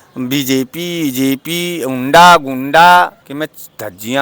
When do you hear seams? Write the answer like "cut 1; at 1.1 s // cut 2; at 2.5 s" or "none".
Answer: cut 1; at 3.2 s